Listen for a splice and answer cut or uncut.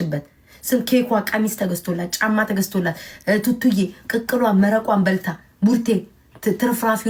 uncut